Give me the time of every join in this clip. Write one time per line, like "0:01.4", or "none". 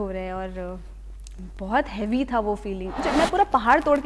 0:03.0